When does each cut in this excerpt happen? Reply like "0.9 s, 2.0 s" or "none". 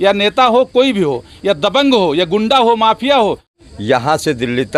3.6 s